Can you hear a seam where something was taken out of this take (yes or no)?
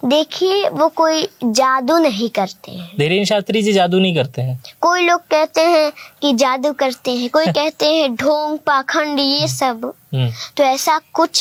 no